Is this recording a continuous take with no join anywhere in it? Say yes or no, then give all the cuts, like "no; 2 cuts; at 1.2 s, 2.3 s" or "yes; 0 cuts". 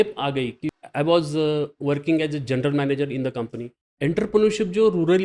no; 2 cuts; at 0.8 s, 3.9 s